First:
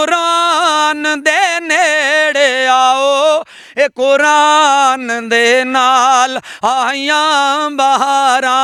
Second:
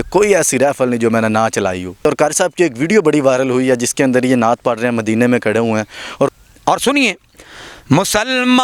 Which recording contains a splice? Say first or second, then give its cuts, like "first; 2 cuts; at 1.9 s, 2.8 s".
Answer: second; 2 cuts; at 2.0 s, 6.3 s